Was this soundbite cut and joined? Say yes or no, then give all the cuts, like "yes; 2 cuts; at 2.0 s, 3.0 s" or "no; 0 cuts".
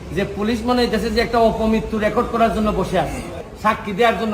yes; 1 cut; at 3.4 s